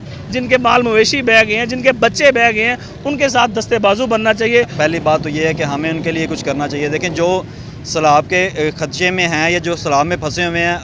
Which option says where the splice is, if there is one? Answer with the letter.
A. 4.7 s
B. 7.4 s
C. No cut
A